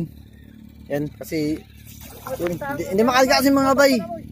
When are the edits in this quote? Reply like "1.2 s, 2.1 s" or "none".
none